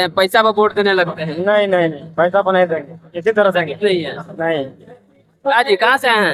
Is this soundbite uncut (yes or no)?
yes